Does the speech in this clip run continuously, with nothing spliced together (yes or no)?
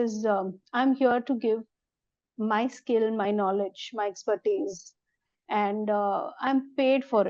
yes